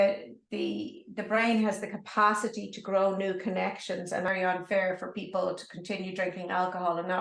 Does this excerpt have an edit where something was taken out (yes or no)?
yes